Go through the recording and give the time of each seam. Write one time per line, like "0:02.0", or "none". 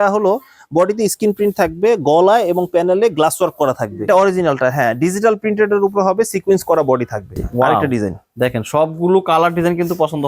0:04.0
0:07.4